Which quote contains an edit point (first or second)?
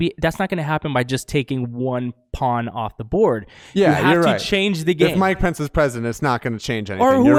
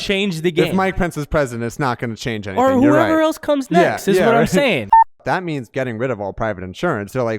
second